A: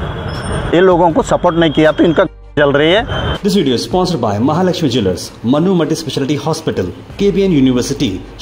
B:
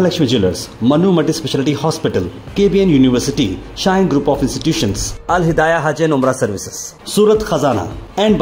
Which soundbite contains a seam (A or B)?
A